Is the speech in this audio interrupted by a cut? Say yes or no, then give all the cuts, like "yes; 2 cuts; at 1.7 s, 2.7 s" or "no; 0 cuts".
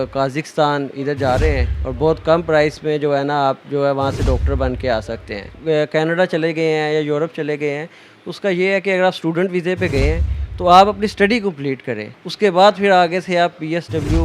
yes; 2 cuts; at 5.6 s, 12.1 s